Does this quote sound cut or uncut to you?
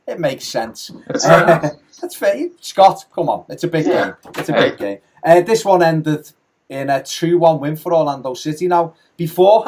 cut